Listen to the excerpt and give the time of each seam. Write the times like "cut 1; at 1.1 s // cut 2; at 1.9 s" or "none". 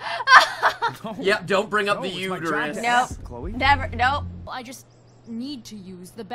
cut 1; at 4.5 s